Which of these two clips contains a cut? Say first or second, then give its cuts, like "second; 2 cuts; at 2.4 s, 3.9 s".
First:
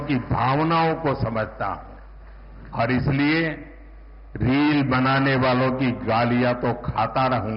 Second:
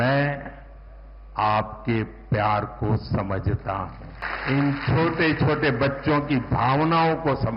second; 1 cut; at 4.2 s